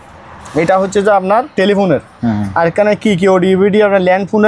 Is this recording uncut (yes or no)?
yes